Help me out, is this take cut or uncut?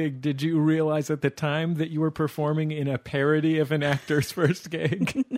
uncut